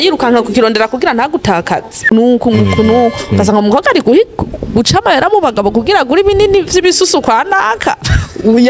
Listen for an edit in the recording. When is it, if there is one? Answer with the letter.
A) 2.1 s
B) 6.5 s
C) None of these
A